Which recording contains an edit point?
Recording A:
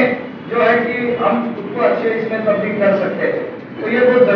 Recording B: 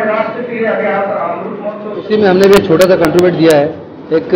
B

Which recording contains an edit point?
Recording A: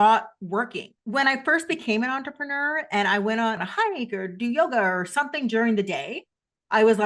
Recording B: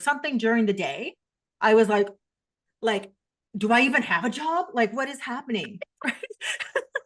A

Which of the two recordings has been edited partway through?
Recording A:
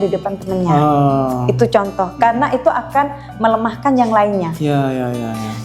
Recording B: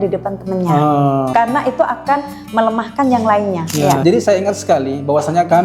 B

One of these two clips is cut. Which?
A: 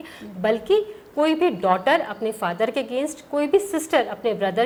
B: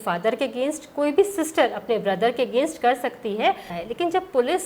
B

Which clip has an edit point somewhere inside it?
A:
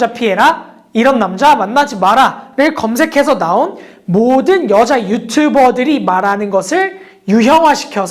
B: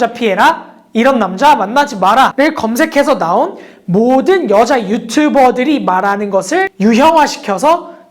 B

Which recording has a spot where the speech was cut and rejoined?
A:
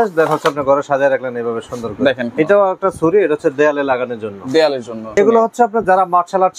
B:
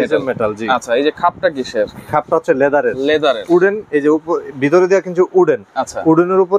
A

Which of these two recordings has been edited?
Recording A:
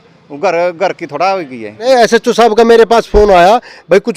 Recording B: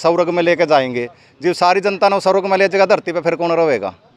A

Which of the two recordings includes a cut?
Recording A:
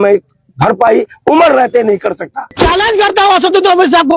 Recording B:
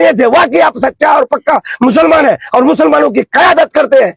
A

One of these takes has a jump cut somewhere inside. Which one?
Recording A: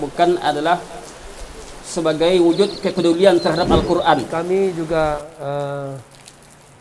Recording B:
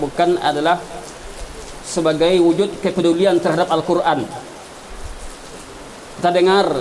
A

